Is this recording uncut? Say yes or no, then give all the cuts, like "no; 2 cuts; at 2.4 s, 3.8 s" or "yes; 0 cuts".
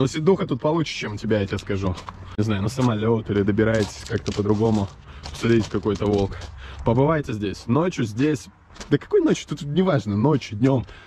no; 1 cut; at 2.6 s